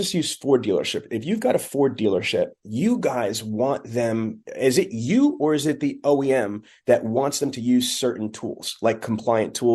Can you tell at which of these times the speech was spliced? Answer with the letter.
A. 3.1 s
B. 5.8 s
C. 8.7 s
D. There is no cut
D